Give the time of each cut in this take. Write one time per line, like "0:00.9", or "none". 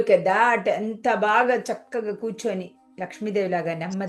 none